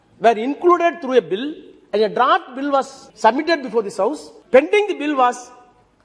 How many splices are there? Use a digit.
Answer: 2